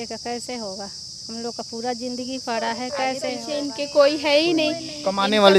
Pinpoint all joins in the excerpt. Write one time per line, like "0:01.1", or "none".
none